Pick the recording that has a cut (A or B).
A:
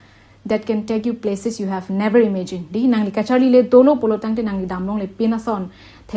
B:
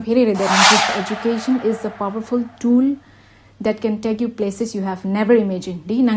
B